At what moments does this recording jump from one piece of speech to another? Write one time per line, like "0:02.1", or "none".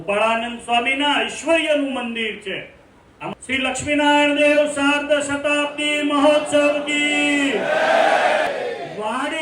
0:03.3
0:08.5